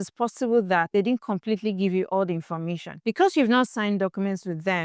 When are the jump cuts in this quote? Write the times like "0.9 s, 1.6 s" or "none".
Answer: 3.7 s